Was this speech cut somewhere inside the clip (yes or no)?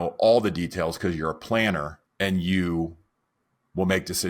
yes